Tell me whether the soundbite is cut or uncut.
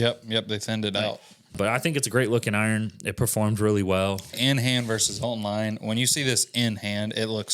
cut